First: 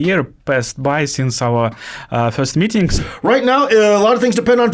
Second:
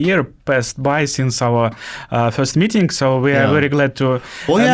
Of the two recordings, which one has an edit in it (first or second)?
first